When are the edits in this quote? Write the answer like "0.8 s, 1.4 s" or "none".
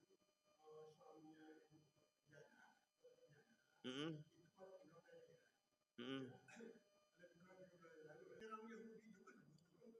8.4 s